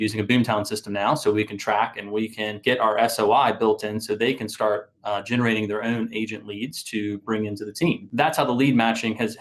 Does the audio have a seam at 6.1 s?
no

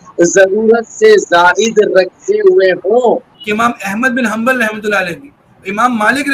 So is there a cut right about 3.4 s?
yes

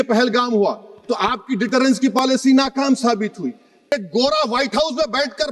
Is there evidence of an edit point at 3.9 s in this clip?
yes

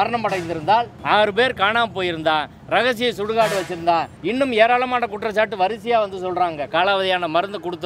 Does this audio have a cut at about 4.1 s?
yes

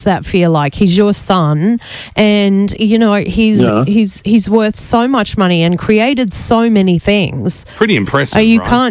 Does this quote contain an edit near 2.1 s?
no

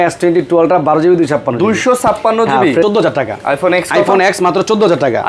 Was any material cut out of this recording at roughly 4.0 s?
no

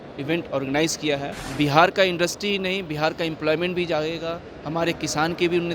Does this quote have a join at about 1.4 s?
yes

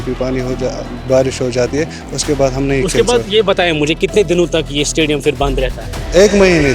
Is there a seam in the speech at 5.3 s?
no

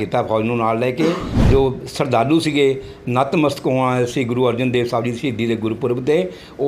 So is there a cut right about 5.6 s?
no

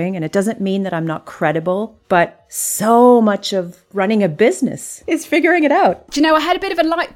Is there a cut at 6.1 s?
yes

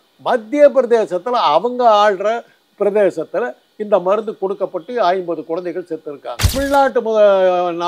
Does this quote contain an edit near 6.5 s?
yes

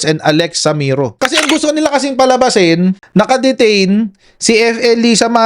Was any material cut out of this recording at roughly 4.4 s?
no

